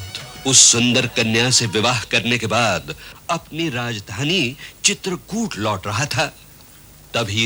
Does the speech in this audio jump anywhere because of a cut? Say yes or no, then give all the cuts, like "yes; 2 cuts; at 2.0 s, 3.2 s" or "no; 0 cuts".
no; 0 cuts